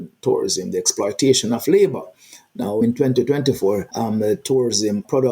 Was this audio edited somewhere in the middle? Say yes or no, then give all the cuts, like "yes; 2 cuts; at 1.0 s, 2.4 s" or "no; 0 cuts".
yes; 2 cuts; at 2.8 s, 3.9 s